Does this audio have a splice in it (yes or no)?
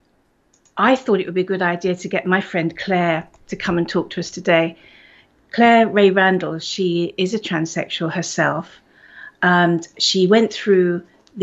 no